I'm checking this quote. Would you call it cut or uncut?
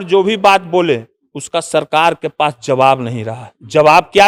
uncut